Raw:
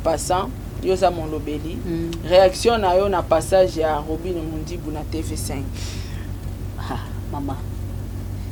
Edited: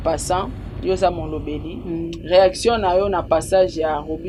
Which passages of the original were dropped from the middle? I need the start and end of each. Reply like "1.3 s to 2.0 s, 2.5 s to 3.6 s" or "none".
none